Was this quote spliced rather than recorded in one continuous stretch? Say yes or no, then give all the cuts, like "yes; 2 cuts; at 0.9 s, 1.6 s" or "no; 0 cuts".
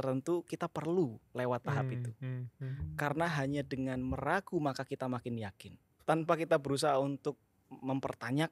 yes; 1 cut; at 5.9 s